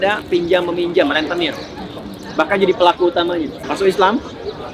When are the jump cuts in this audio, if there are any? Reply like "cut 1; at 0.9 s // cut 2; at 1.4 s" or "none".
cut 1; at 3.6 s